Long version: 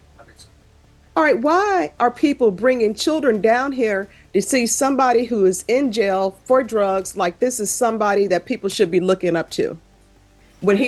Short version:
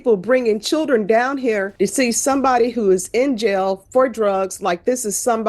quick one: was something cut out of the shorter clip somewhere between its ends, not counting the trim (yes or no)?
yes